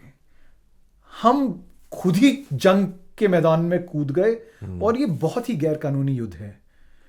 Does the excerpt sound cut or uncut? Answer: uncut